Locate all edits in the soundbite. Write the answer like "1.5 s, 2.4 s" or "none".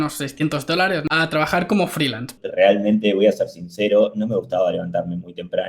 1.0 s, 2.4 s